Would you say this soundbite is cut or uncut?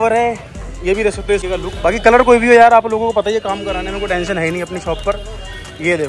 cut